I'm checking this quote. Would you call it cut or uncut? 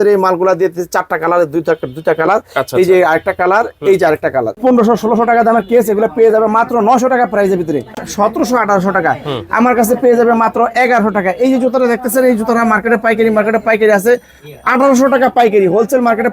cut